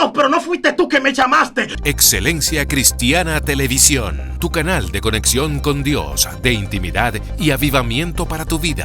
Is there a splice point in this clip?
yes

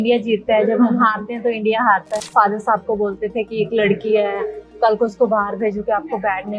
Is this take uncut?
no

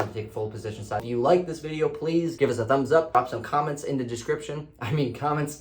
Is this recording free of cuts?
no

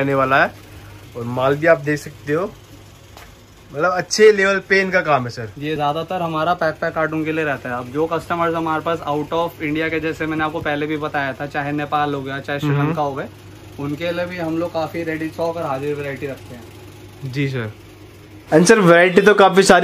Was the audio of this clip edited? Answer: no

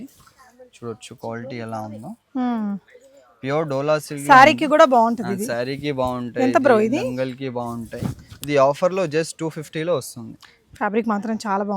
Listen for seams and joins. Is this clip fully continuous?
yes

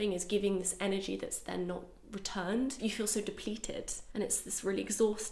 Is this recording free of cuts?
no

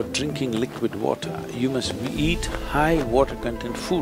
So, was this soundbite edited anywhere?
no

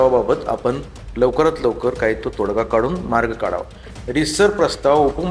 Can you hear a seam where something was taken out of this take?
yes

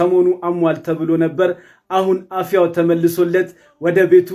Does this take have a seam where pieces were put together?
no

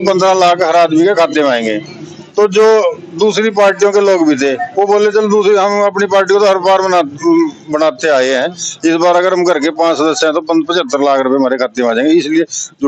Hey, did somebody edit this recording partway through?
no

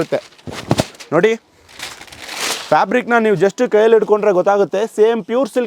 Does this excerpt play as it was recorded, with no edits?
yes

